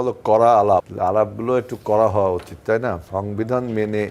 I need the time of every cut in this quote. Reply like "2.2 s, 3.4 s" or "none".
0.9 s, 3.0 s